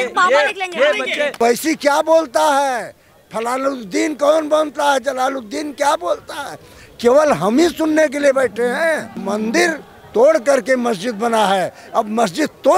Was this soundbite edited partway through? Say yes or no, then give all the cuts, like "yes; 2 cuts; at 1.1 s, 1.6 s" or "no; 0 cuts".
yes; 2 cuts; at 1.4 s, 9.1 s